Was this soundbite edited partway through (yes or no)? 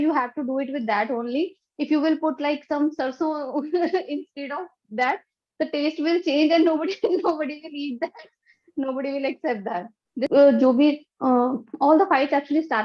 yes